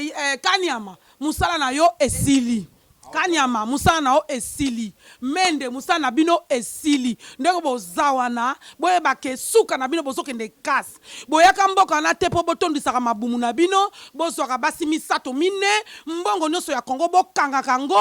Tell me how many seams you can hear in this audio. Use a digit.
0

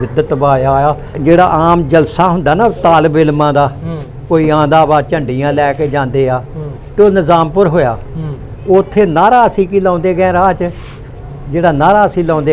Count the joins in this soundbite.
1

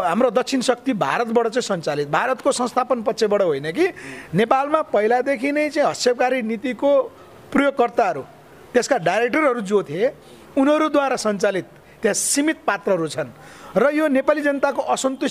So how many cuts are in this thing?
0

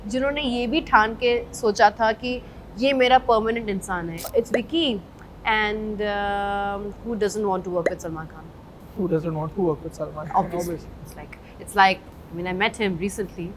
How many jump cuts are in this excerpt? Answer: 1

